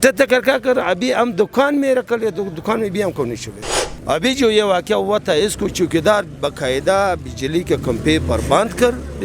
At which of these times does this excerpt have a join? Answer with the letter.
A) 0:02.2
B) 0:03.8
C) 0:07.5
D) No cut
B